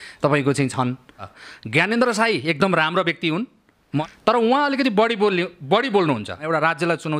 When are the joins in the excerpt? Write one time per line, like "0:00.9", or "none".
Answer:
0:01.2
0:04.0
0:06.5